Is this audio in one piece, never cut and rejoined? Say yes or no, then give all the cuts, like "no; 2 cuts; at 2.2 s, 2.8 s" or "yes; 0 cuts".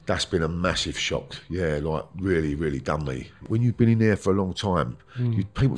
no; 1 cut; at 3.4 s